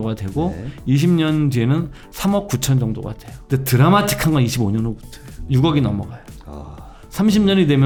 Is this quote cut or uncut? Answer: uncut